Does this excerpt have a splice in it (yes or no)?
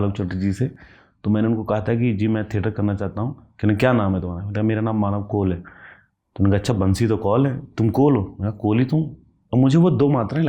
no